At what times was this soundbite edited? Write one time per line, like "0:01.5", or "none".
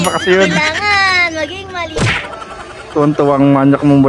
0:02.1